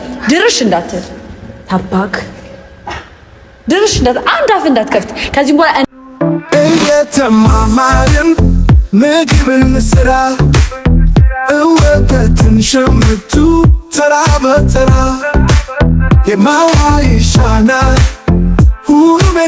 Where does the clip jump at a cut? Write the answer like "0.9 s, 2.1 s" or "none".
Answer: 6.0 s